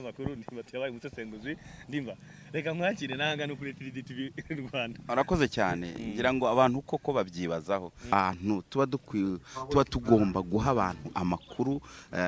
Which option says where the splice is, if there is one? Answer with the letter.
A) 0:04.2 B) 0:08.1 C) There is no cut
B